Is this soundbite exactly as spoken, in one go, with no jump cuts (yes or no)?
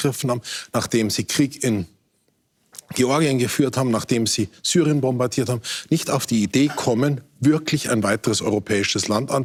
yes